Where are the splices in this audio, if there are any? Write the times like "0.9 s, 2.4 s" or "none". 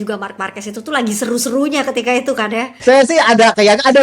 2.7 s